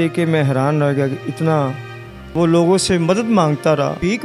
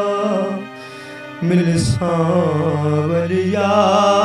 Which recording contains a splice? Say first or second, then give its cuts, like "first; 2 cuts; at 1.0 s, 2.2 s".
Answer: first; 1 cut; at 2.3 s